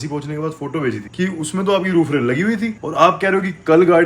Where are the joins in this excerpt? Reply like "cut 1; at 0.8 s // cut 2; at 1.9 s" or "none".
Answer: cut 1; at 1.1 s